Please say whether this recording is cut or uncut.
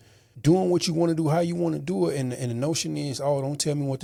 uncut